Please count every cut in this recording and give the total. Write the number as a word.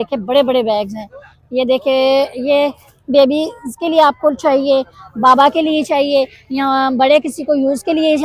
zero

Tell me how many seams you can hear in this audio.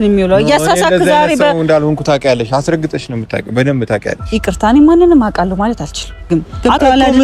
one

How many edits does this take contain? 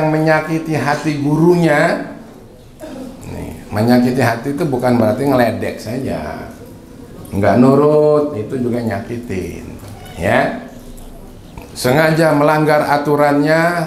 zero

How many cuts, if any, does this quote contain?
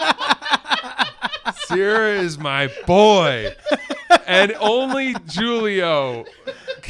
zero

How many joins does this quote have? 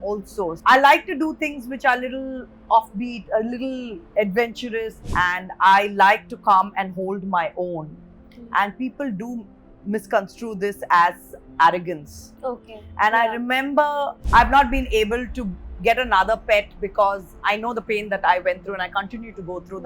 two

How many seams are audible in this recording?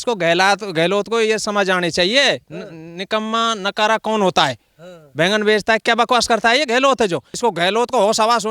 one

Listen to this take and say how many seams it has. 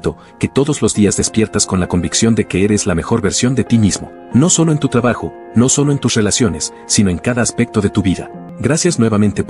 one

